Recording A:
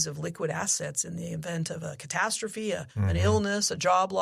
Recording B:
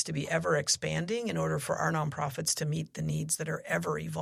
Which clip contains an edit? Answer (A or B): A